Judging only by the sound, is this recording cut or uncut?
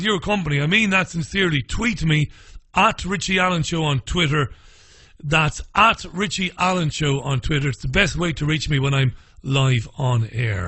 cut